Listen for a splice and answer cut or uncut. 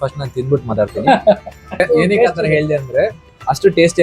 cut